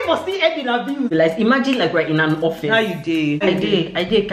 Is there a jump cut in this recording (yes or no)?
yes